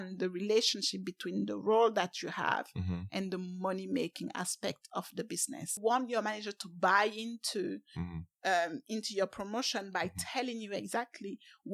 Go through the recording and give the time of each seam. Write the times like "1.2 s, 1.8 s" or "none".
5.8 s